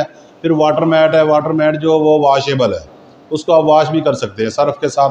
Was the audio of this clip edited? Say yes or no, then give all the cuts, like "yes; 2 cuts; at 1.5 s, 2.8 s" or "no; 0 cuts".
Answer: no; 0 cuts